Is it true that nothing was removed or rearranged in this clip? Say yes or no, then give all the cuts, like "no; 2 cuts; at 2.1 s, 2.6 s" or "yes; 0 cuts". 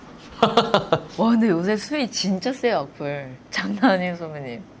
no; 1 cut; at 1.1 s